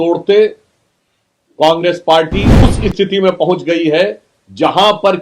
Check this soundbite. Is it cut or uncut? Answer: cut